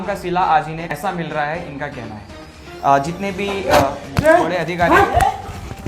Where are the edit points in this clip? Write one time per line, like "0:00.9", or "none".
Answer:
0:00.9